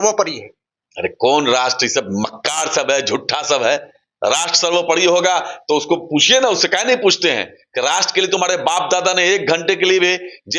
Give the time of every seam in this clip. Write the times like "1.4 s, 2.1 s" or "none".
none